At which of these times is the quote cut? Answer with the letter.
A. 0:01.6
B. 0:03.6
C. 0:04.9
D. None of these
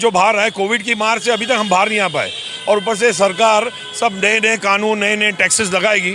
D